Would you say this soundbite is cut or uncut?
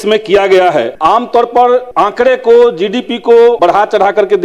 cut